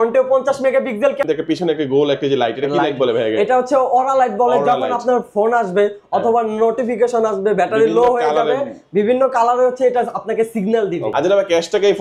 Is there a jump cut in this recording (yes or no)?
yes